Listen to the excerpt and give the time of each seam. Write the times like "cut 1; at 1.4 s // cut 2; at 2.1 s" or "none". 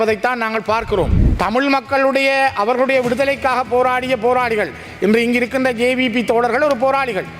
cut 1; at 1.2 s